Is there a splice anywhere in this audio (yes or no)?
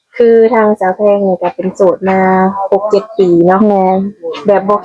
no